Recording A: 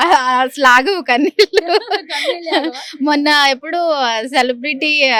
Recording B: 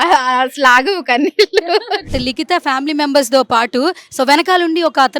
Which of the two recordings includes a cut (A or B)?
B